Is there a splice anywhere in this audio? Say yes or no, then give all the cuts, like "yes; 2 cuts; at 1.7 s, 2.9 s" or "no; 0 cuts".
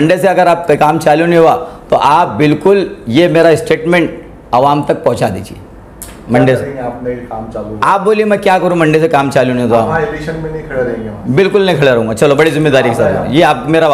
no; 0 cuts